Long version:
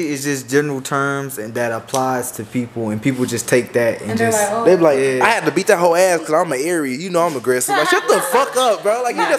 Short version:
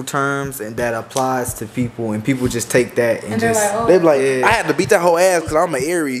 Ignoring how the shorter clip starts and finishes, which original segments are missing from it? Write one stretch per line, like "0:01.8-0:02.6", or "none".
none